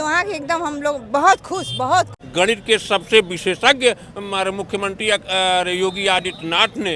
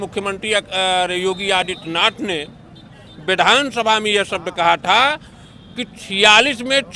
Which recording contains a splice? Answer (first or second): first